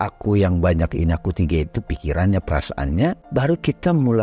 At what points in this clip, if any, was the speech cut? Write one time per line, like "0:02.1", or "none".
0:03.2